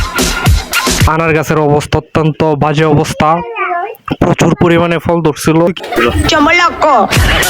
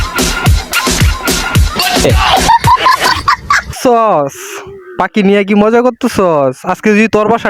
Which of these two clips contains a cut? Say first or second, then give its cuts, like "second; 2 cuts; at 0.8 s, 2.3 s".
first; 2 cuts; at 1.1 s, 5.7 s